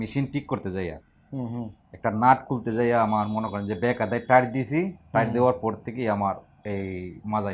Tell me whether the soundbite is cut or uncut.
uncut